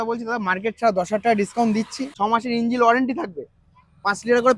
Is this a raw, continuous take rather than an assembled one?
no; 1 cut; at 2.0 s

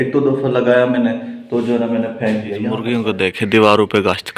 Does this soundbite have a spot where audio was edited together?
yes; 1 cut; at 2.7 s

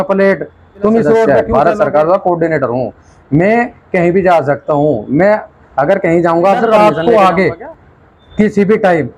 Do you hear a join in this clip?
yes; 2 cuts; at 1.3 s, 6.7 s

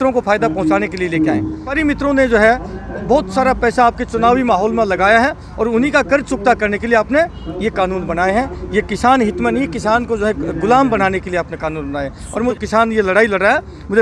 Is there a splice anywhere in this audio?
yes; 2 cuts; at 1.8 s, 12.5 s

